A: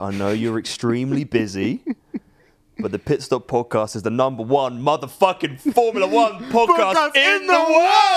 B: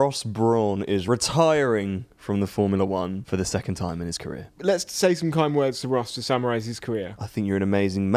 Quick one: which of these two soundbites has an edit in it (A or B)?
B